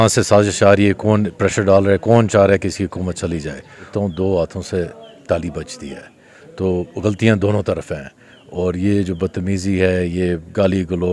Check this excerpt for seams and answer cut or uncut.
cut